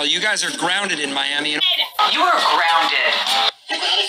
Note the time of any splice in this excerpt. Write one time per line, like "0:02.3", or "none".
0:02.1